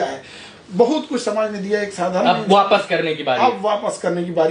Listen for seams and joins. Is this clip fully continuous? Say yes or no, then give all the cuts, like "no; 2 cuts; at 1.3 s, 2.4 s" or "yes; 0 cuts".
yes; 0 cuts